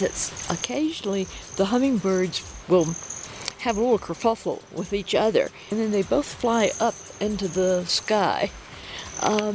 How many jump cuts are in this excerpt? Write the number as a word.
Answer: one